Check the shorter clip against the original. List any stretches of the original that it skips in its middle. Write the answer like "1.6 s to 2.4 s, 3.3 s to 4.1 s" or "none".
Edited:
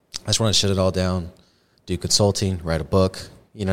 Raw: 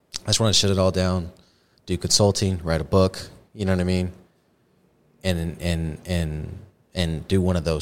none

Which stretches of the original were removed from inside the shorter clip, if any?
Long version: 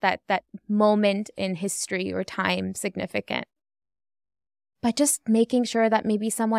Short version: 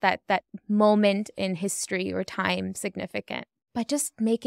3.5 s to 4.6 s

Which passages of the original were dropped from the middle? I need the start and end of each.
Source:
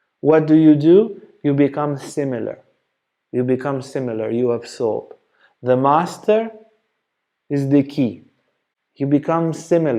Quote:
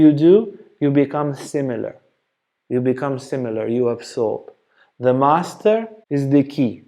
6.6 s to 7.4 s

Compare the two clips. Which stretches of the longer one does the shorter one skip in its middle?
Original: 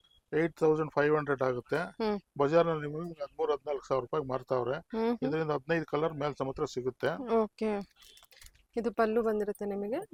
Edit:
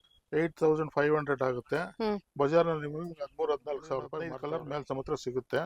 4.3 s to 5.8 s

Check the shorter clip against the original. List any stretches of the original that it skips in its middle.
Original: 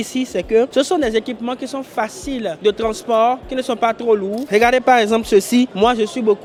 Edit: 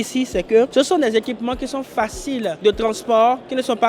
none

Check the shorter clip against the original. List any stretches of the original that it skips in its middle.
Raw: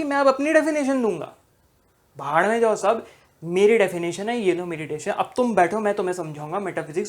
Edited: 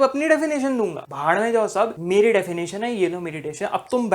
1.3 s to 2.1 s, 3.1 s to 3.4 s

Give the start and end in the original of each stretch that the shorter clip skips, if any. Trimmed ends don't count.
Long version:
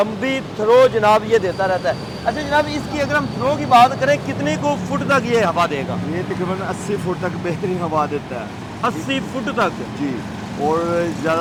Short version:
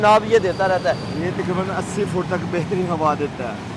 2.1 s to 6.0 s

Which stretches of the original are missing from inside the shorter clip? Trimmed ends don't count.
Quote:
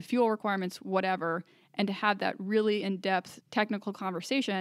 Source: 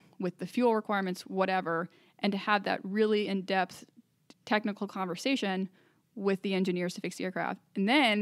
3.8 s to 4.3 s

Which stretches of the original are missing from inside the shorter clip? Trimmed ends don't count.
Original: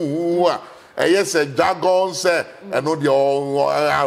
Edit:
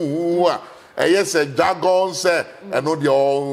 none

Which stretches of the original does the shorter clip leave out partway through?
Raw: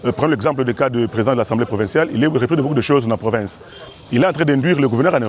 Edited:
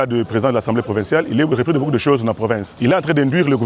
3.5 s to 4.0 s

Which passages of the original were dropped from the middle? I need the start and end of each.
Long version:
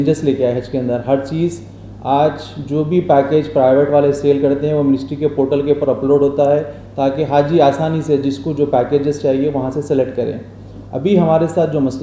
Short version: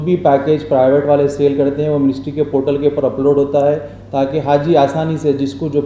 none

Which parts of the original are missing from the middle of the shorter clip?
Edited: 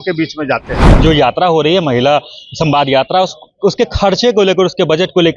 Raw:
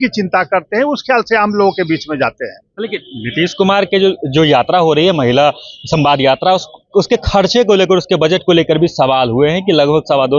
2.6 s to 4.2 s

